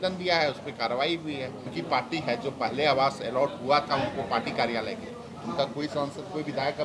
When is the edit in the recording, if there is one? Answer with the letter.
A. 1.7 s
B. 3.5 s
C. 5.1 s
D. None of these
A